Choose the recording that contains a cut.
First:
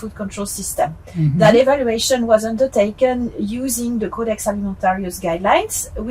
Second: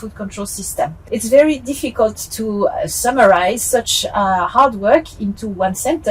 second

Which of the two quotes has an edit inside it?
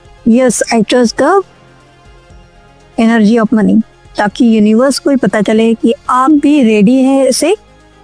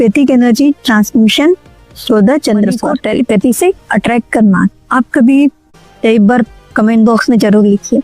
second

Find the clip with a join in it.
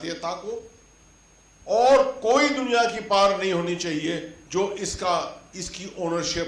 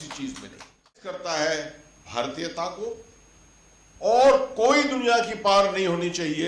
second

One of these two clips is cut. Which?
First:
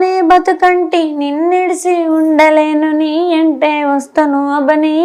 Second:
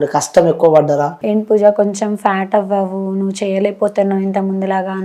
second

